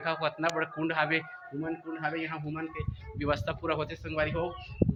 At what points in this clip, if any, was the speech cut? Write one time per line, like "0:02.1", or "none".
none